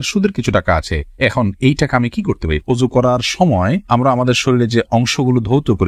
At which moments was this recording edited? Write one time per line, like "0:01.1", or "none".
0:02.6